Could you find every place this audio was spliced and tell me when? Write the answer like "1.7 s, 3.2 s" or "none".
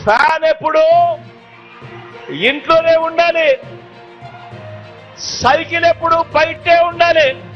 3.6 s, 5.3 s